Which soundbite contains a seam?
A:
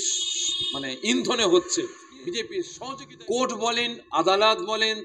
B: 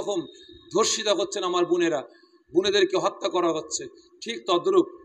A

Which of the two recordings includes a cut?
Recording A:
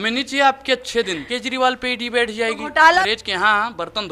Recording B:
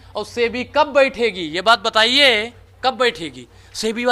A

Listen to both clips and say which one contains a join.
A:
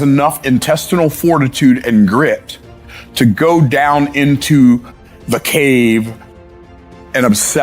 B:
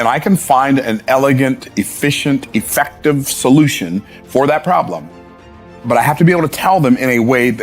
A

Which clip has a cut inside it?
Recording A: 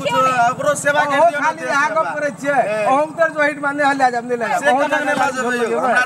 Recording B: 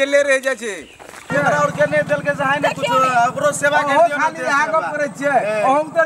B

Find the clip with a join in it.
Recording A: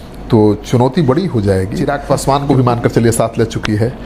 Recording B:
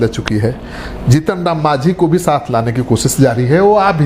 A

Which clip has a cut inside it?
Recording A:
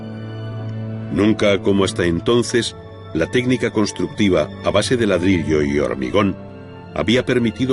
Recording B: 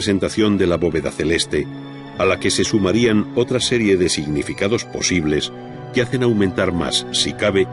A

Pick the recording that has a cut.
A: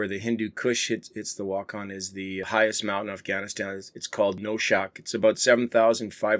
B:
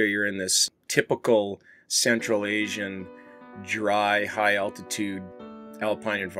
A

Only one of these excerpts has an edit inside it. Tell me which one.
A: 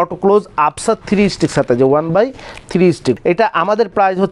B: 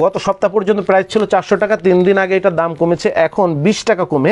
A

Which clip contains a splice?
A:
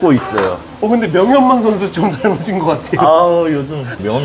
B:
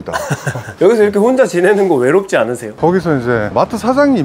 B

